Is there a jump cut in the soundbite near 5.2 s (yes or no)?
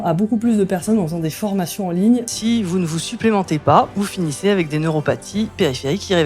no